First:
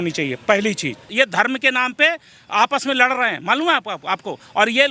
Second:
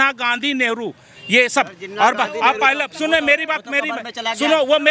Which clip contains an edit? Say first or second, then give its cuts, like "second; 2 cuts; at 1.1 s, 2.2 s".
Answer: first; 1 cut; at 1.0 s